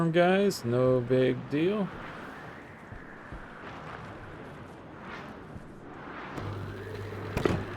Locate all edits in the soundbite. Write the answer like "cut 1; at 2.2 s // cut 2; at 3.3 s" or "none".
cut 1; at 3.6 s

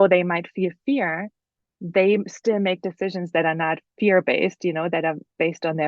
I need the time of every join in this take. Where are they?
none

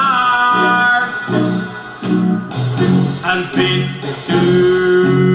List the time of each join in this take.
cut 1; at 2.0 s

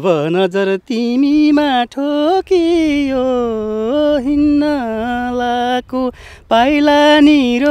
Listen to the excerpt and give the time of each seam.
none

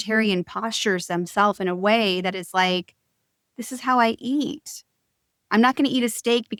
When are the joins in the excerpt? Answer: none

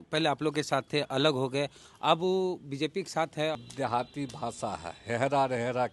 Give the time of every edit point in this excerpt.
cut 1; at 3.6 s

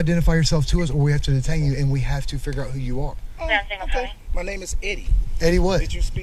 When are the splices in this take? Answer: none

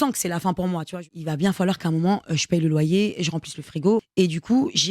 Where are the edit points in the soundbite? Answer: cut 1; at 1.0 s // cut 2; at 4.1 s

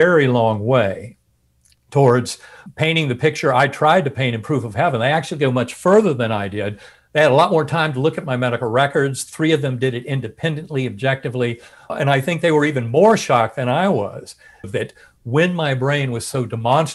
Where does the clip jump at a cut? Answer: cut 1; at 2.6 s // cut 2; at 11.9 s // cut 3; at 14.7 s

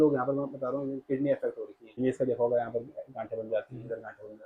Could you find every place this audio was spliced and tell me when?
cut 1; at 1.8 s

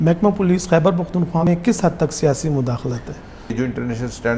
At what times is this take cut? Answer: cut 1; at 1.5 s // cut 2; at 3.5 s

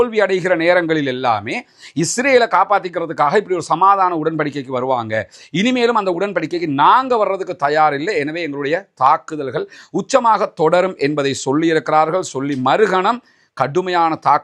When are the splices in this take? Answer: none

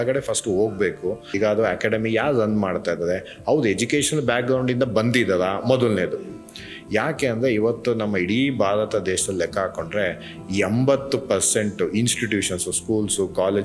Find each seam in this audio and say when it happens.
cut 1; at 1.2 s

